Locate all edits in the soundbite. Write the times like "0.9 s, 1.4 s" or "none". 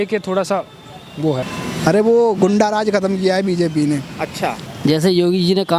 1.5 s, 4.6 s